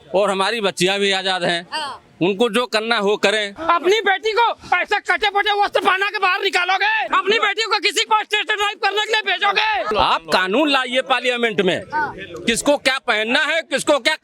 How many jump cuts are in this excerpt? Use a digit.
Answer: 3